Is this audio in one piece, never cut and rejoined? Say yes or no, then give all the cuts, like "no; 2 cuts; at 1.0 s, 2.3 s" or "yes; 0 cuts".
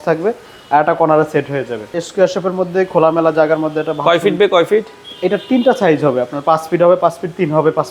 no; 1 cut; at 1.9 s